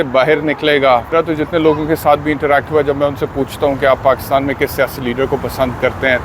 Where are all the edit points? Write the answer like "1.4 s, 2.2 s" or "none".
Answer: 1.1 s